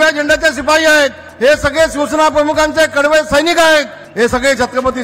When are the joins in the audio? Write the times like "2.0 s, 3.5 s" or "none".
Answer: 1.2 s, 4.0 s